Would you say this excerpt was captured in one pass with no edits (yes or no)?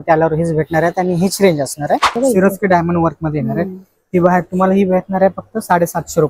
no